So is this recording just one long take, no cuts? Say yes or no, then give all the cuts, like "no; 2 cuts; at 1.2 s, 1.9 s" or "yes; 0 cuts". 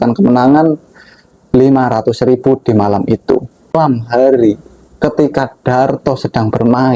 no; 1 cut; at 3.7 s